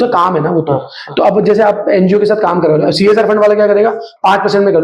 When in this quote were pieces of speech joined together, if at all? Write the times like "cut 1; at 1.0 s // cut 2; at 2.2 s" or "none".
none